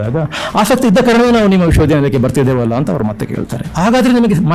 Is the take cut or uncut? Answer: uncut